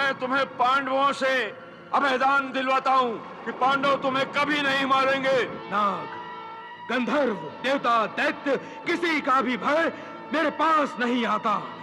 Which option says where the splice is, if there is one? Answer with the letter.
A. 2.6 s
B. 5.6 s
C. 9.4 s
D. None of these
B